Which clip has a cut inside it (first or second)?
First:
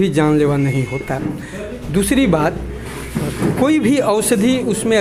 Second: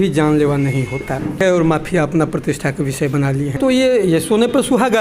second